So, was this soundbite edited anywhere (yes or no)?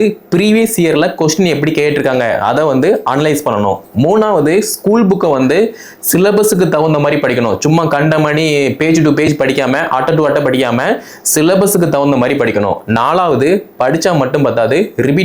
no